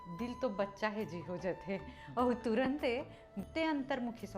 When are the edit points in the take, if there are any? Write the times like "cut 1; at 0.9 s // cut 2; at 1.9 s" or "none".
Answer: cut 1; at 3.4 s